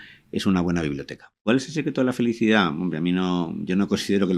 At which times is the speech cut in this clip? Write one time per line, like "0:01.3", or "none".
0:01.4